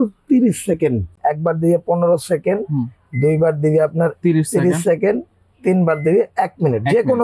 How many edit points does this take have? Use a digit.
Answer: 1